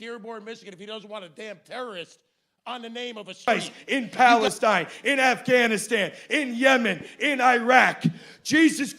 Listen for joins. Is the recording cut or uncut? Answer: cut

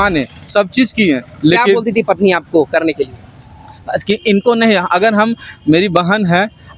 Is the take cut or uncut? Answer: uncut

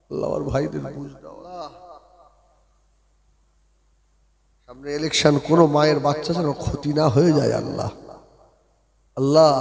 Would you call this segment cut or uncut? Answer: cut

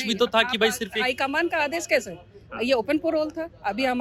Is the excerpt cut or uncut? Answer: uncut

